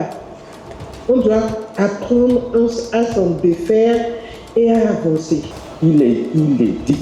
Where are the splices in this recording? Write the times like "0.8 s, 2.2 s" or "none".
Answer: 5.6 s